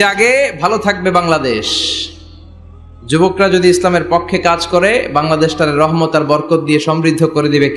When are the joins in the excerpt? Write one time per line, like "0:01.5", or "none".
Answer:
none

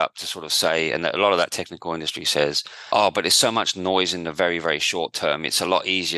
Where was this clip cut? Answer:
0:02.7

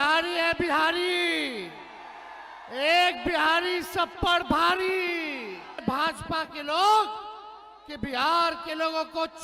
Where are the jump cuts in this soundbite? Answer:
0:05.8

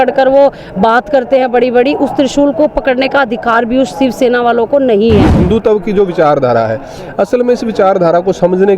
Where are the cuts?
0:05.4

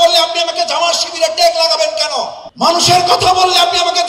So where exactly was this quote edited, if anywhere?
none

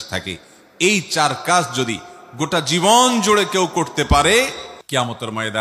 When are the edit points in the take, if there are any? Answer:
0:04.7

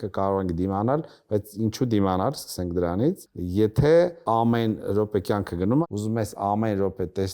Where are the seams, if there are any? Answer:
0:03.3
0:04.2
0:05.8

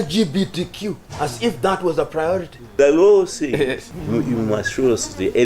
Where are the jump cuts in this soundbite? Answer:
0:02.6
0:03.9

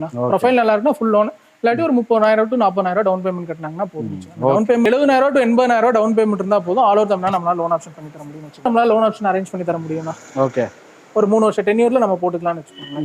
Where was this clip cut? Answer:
0:04.9
0:08.6

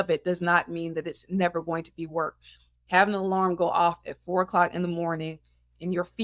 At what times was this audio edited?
none

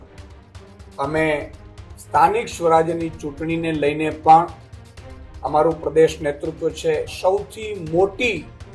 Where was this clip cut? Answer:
0:07.1

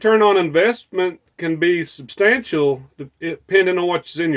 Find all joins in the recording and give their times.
none

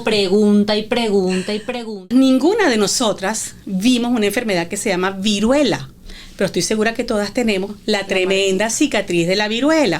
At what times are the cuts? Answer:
0:01.9

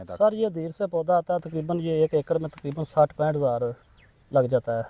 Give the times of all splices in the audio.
none

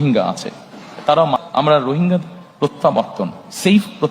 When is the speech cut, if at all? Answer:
0:01.4

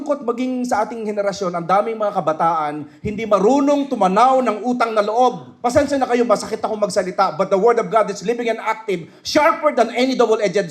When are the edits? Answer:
0:05.5

